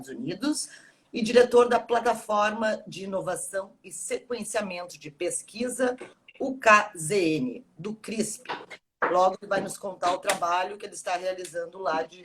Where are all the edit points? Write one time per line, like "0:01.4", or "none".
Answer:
0:05.7